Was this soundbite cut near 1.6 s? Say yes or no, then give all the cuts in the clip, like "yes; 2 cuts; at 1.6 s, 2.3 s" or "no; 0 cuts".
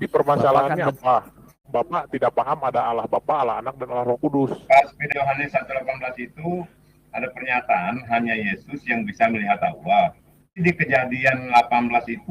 yes; 3 cuts; at 1.6 s, 5.0 s, 10.5 s